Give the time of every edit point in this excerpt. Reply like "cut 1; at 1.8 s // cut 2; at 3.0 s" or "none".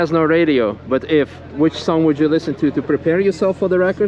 none